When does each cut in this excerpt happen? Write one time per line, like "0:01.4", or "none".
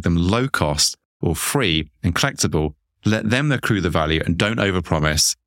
none